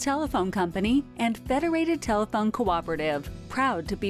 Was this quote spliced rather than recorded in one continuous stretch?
no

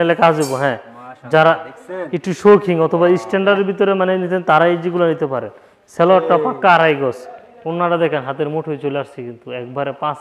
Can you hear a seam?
no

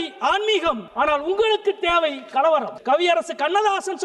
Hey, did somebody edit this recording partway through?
yes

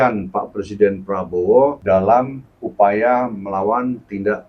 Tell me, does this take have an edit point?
yes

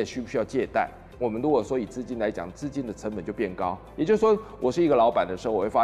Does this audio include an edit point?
no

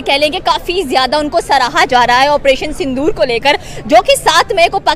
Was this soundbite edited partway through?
no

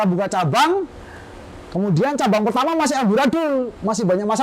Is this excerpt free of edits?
yes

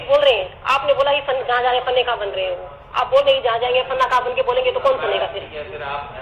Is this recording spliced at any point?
no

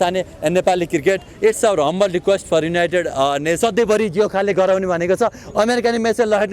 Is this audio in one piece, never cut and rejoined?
no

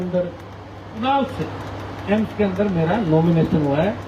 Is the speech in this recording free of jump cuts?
no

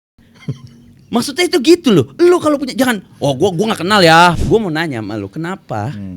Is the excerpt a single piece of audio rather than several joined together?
no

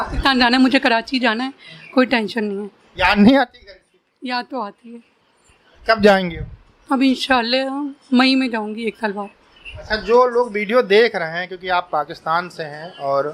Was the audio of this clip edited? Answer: no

